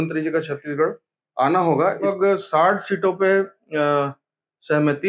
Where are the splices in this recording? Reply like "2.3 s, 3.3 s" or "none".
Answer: 2.1 s